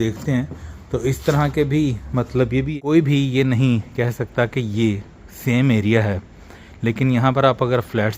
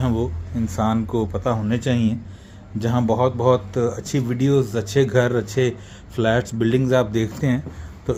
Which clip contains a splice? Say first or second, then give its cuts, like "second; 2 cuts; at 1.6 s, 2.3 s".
first; 1 cut; at 2.7 s